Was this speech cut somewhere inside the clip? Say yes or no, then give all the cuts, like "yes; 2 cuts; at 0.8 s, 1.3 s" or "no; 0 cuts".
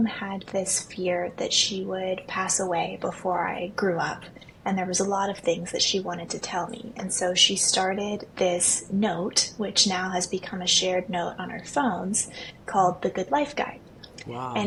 no; 0 cuts